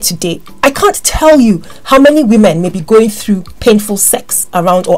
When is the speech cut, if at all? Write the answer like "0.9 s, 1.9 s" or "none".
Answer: none